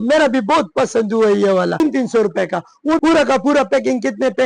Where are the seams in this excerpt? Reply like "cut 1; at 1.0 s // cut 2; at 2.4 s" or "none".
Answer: cut 1; at 1.8 s // cut 2; at 3.0 s